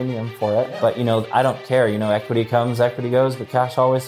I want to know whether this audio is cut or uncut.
uncut